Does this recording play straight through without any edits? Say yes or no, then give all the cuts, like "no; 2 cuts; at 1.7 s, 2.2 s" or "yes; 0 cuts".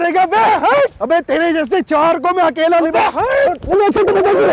yes; 0 cuts